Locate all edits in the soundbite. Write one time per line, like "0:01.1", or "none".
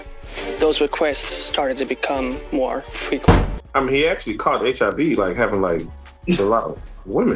0:03.5